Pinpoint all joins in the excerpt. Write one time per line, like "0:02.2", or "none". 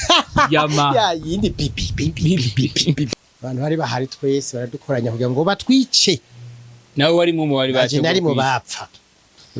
0:03.1